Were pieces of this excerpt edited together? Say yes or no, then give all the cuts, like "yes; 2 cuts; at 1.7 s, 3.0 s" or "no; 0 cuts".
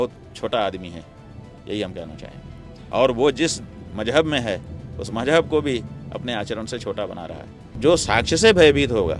yes; 1 cut; at 7.7 s